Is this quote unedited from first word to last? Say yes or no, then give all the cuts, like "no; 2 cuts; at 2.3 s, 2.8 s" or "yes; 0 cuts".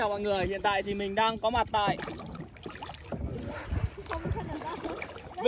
yes; 0 cuts